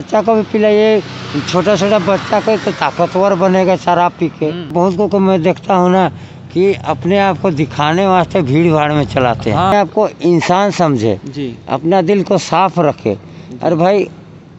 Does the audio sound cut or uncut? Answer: cut